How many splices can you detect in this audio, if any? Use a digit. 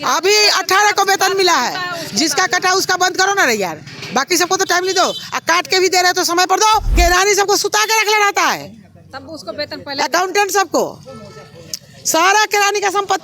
1